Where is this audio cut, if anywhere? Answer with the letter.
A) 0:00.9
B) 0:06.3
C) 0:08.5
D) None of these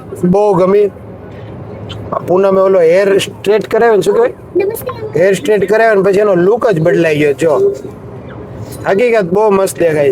D